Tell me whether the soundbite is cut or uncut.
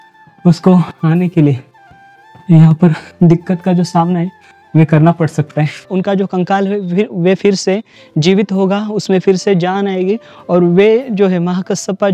cut